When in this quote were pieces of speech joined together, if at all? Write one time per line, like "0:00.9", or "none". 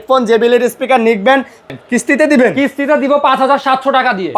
0:01.6